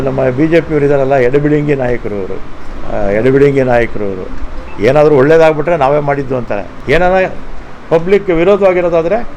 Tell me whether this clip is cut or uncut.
uncut